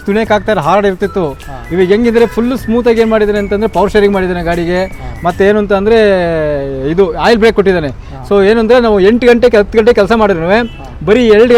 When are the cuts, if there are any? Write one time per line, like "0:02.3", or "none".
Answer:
none